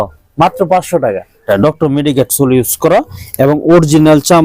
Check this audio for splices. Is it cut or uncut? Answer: cut